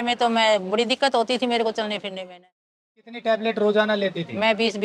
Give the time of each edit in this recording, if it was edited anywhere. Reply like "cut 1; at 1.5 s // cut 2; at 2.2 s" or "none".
cut 1; at 3.2 s